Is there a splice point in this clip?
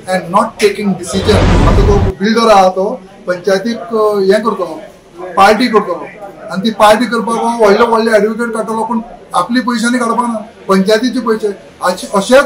yes; 1 cut; at 1.6 s

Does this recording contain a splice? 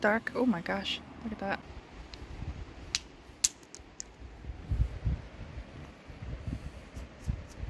yes; 1 cut; at 1.6 s

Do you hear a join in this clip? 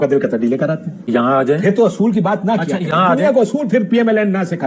no; 0 cuts

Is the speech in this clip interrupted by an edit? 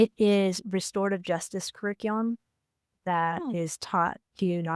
no; 0 cuts

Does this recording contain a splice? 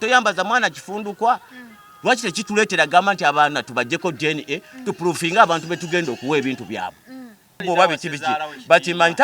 yes; 1 cut; at 7.5 s

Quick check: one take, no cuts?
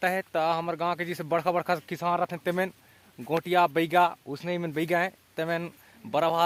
yes; 0 cuts

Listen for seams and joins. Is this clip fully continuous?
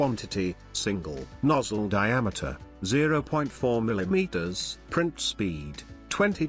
yes; 0 cuts

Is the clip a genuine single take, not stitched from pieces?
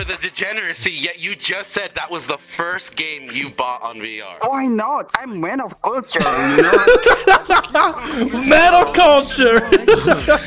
no; 2 cuts; at 4.2 s, 5.1 s

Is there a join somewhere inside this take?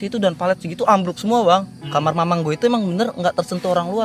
yes; 1 cut; at 1.8 s

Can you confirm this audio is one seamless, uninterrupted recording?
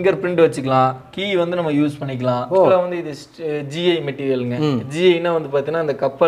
no; 1 cut; at 2.7 s

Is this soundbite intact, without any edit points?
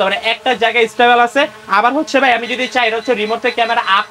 yes; 0 cuts

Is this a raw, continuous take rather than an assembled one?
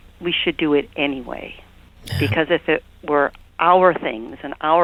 yes; 0 cuts

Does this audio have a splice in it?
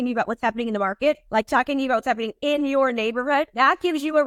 yes; 2 cuts; at 1.2 s, 3.5 s

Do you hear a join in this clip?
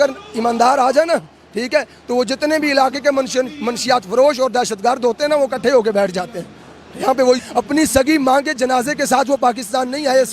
yes; 1 cut; at 7.4 s

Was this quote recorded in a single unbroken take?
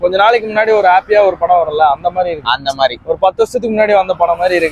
yes; 0 cuts

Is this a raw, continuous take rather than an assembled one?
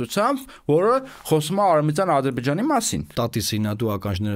no; 1 cut; at 3.1 s

